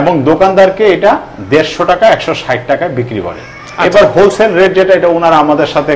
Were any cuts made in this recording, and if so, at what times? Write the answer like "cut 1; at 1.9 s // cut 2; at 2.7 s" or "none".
none